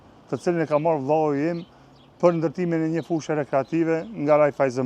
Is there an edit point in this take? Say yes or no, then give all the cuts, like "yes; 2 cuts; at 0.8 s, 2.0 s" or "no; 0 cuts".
no; 0 cuts